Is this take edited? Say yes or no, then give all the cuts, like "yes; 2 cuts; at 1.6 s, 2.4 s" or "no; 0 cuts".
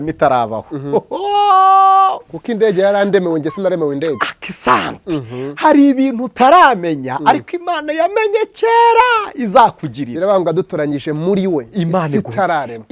no; 0 cuts